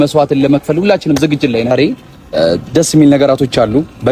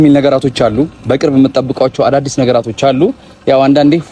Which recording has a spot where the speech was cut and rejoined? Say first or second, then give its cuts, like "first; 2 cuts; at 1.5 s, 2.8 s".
first; 1 cut; at 1.7 s